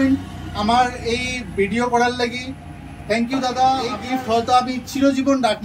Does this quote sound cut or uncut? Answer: cut